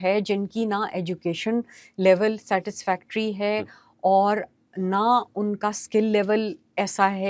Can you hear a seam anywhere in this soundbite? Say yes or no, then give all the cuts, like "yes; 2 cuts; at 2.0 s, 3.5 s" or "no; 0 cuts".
no; 0 cuts